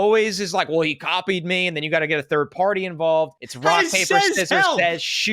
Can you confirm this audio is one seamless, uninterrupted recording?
no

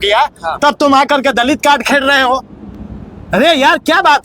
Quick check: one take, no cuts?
yes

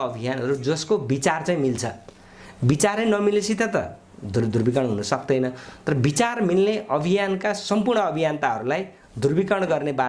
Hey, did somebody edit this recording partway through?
no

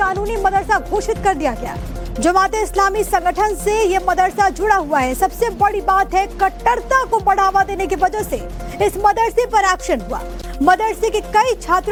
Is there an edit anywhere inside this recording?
no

